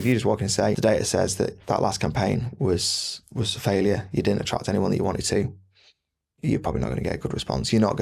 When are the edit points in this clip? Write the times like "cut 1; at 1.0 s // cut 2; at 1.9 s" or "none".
none

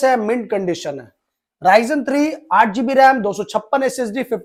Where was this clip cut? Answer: none

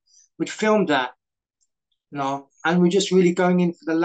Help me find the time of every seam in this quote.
cut 1; at 2.5 s

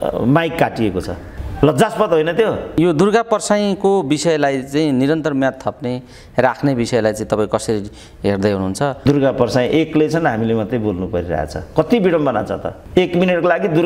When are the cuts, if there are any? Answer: cut 1; at 2.8 s // cut 2; at 9.1 s

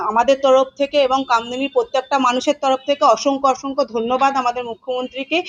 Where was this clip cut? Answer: none

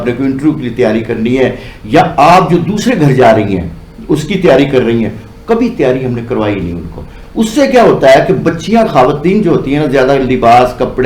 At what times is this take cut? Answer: none

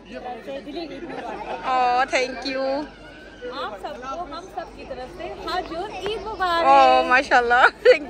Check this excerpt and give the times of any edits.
none

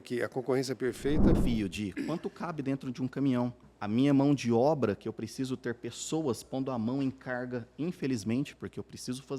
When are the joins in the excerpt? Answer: cut 1; at 1.4 s // cut 2; at 3.7 s

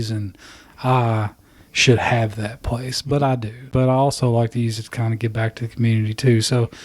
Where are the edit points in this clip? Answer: cut 1; at 3.6 s

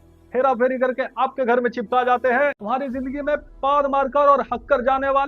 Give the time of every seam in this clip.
cut 1; at 2.6 s

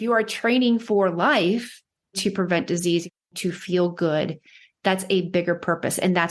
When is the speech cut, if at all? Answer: cut 1; at 2.2 s // cut 2; at 3.3 s

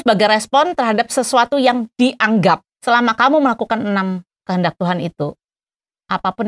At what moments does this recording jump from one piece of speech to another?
cut 1; at 2.7 s

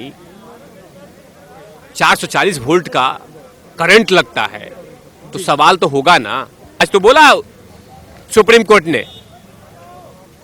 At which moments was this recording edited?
cut 1; at 6.6 s

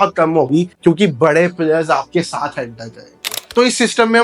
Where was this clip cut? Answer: cut 1; at 3.3 s

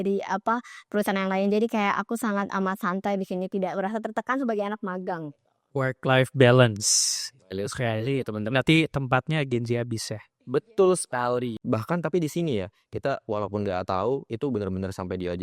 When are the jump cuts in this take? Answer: cut 1; at 11.6 s

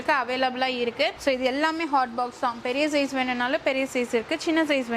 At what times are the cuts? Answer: cut 1; at 1.1 s

